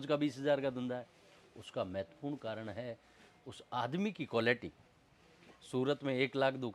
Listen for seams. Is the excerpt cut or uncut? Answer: uncut